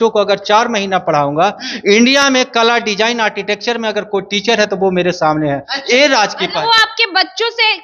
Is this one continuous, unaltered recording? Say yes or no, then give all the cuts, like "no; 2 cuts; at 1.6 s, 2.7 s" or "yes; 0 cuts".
yes; 0 cuts